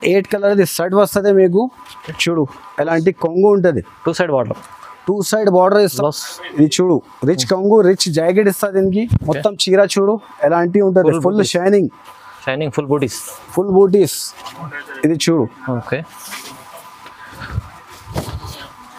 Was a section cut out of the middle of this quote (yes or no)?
yes